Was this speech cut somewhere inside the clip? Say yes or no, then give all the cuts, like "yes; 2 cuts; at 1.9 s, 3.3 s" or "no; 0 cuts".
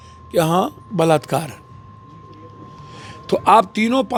no; 0 cuts